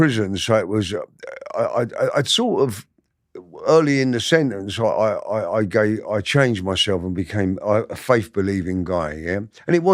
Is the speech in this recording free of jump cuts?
yes; 0 cuts

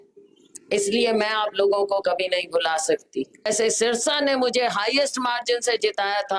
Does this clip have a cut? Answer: yes; 1 cut; at 3.5 s

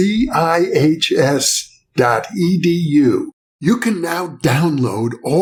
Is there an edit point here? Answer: no; 0 cuts

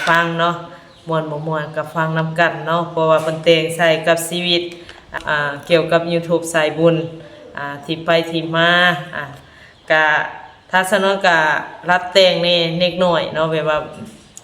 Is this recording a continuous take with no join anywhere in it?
no; 1 cut; at 5.2 s

